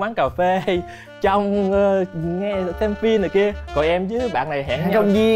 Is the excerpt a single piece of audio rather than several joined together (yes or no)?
yes